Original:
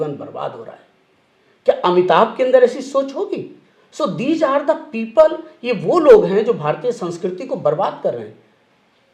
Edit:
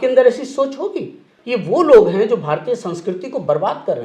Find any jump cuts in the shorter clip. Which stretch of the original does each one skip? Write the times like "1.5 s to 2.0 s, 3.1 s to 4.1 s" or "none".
3.7 s to 5.5 s